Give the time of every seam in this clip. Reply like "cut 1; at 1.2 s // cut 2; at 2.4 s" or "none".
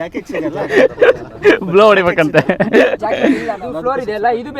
cut 1; at 3.6 s